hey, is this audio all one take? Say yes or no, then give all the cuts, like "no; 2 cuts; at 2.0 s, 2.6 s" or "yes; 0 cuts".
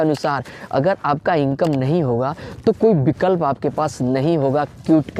yes; 0 cuts